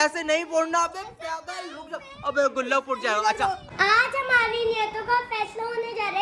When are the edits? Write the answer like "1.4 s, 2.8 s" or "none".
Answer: 3.7 s

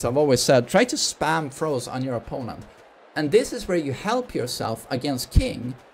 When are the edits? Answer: none

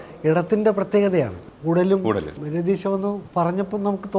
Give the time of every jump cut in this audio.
1.4 s, 2.4 s, 3.2 s

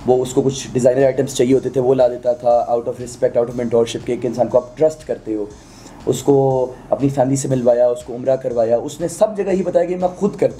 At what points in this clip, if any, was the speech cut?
none

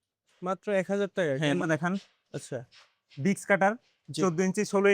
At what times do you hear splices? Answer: 1.6 s

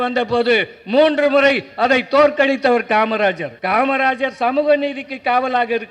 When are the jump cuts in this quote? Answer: 3.5 s

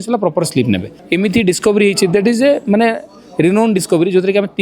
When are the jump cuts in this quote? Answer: 0.9 s

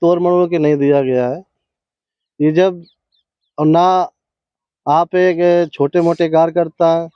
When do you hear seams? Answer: none

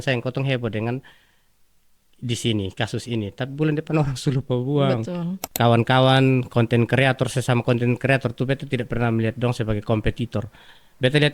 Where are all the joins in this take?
5.4 s

